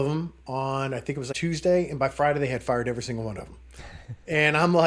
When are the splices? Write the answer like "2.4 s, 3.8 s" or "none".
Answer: 1.3 s